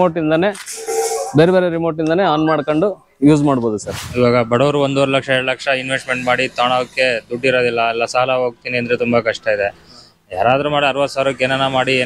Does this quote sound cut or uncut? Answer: cut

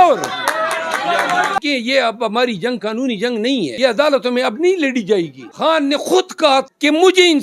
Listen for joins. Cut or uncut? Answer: cut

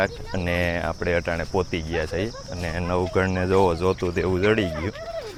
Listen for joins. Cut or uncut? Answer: uncut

